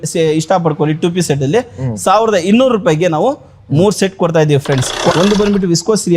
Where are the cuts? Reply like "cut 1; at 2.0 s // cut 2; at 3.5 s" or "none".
cut 1; at 5.1 s